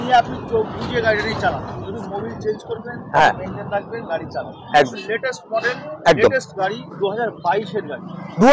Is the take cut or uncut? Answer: cut